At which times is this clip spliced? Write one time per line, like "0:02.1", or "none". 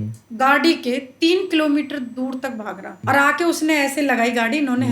0:03.0

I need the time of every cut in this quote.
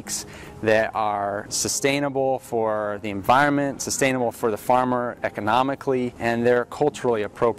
0:01.4
0:06.1

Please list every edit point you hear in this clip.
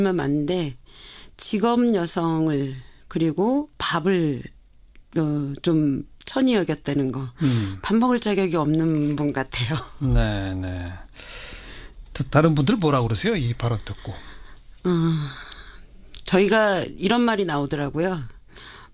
0:14.7

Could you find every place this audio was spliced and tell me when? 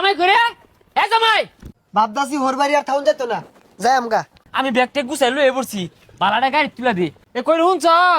0:01.7
0:04.4
0:07.2

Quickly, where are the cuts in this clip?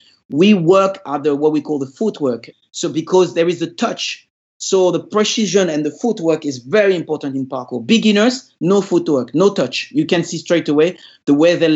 0:02.5

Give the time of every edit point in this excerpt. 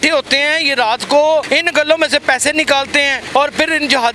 0:01.5
0:03.2

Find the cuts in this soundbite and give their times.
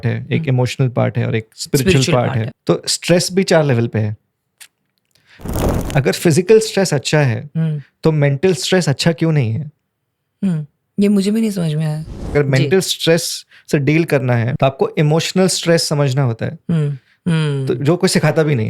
0:02.5
0:05.5
0:12.3
0:14.5

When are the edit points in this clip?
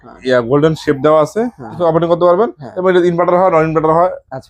0:01.8

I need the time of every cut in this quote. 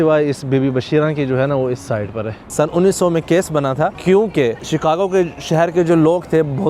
0:02.5
0:04.0
0:04.6

